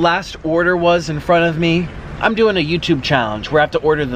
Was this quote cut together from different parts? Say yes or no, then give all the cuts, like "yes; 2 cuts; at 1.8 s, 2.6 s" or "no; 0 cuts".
no; 0 cuts